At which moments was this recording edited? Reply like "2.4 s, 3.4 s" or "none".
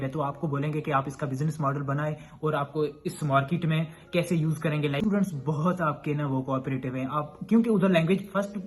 5.0 s